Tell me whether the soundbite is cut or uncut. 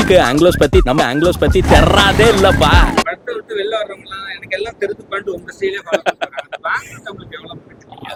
uncut